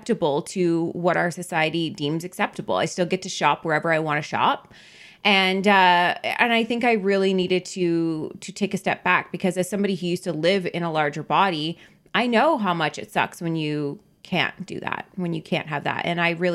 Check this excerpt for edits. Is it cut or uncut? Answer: uncut